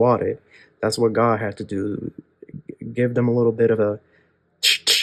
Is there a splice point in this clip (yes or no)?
no